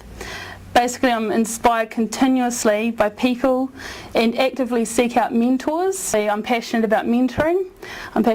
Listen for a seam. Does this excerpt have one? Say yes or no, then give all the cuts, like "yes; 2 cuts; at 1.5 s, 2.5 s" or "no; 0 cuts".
yes; 1 cut; at 6.1 s